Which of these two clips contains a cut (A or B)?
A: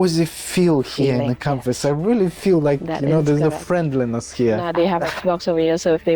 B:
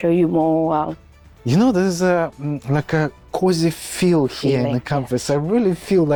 A